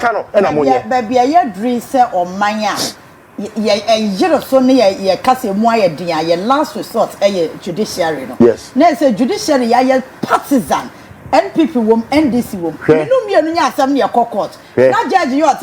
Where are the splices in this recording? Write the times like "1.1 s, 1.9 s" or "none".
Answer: none